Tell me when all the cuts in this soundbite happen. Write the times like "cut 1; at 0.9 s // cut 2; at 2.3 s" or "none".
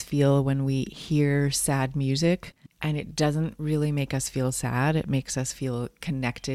cut 1; at 2.6 s

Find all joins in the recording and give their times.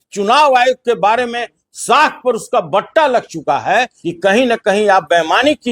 cut 1; at 4.0 s

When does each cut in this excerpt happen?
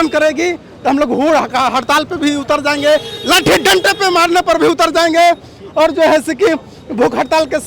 none

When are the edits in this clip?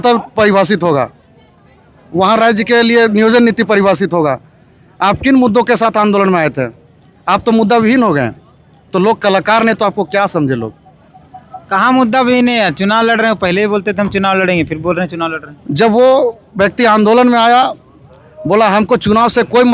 none

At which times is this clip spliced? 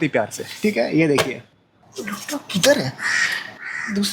cut 1; at 1.8 s

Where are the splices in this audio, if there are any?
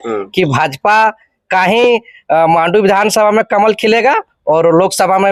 none

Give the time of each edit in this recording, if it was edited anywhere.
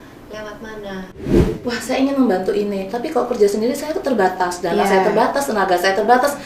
cut 1; at 1.5 s

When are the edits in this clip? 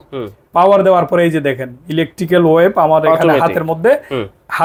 none

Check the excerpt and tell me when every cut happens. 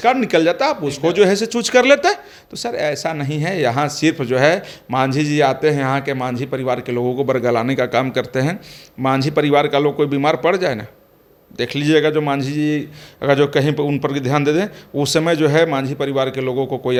none

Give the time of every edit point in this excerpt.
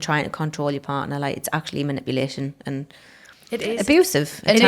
none

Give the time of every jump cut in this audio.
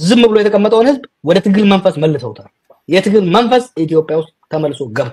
none

